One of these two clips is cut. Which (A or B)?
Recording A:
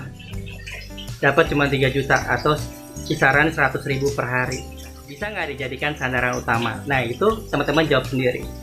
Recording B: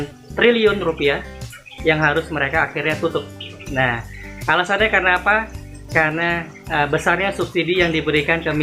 A